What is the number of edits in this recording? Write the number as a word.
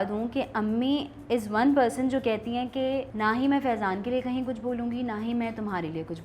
one